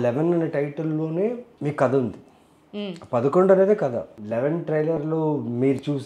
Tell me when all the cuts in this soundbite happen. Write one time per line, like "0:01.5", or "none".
0:01.5
0:04.2